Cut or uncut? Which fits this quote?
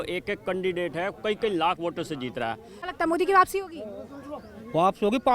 cut